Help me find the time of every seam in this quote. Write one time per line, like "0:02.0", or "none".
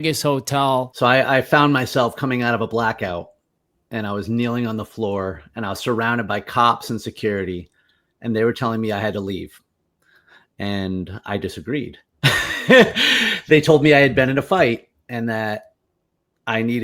0:00.9